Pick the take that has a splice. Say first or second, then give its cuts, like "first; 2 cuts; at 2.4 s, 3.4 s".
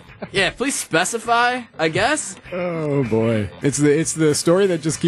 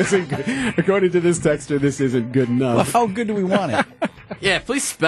first; 1 cut; at 3.5 s